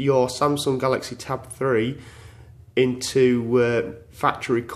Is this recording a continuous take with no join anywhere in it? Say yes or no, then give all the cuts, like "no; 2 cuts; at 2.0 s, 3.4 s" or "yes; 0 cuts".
yes; 0 cuts